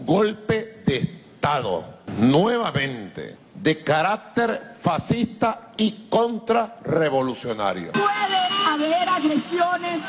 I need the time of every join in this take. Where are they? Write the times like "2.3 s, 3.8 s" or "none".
7.8 s